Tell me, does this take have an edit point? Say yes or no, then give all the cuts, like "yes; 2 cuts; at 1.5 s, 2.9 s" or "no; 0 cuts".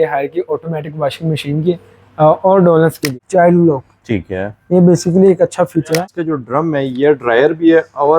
yes; 2 cuts; at 3.1 s, 6.1 s